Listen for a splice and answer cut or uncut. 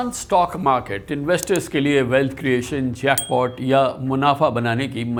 uncut